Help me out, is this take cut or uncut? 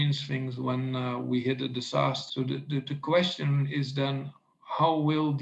cut